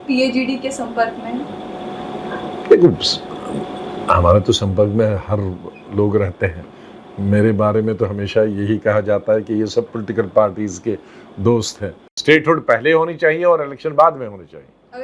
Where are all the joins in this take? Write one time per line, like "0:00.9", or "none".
0:12.1